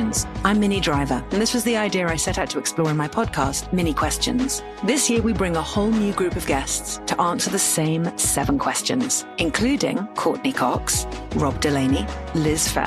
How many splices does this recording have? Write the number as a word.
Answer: zero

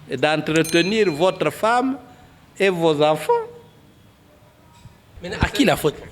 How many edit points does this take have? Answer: one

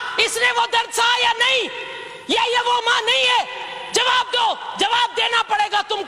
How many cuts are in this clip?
zero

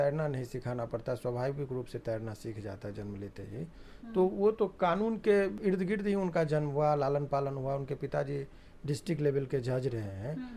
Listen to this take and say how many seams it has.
one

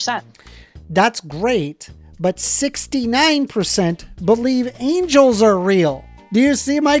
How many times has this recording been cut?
one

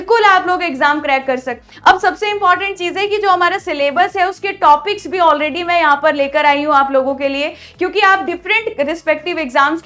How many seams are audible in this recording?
one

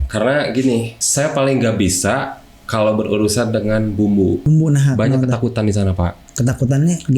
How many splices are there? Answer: two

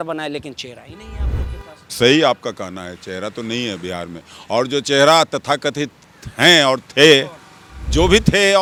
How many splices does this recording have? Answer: zero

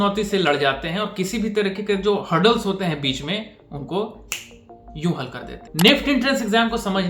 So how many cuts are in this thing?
one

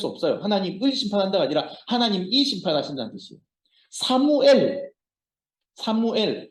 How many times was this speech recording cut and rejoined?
zero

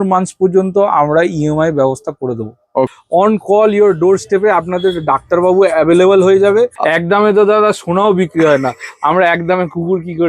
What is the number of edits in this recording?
two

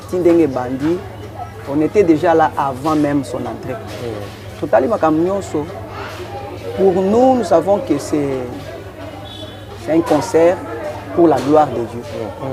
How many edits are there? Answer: zero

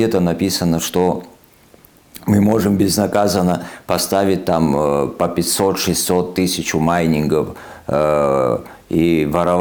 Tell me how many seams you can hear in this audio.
zero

